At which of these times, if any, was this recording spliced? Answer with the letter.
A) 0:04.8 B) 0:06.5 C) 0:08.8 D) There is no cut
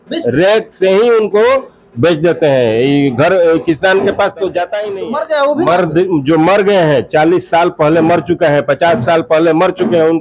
A